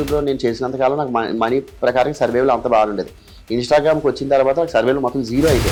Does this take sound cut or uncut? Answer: uncut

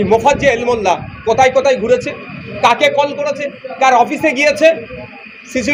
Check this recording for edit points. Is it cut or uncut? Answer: uncut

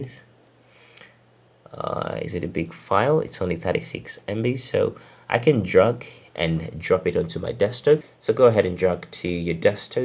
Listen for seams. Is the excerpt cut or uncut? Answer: cut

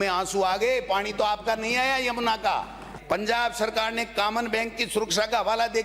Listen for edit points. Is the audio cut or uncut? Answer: cut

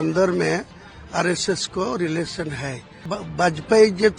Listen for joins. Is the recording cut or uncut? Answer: cut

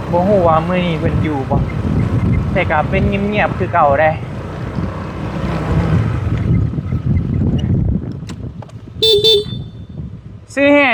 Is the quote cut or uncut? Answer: uncut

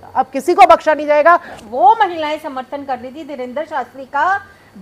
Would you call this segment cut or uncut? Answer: cut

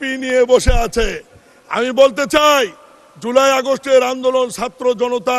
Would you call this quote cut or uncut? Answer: uncut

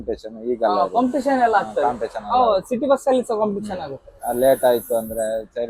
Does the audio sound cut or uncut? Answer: uncut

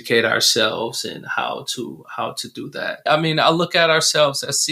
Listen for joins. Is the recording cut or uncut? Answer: cut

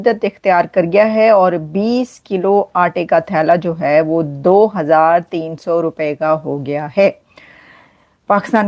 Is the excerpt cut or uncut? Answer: uncut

